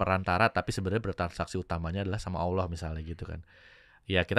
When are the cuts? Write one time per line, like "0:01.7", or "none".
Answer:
none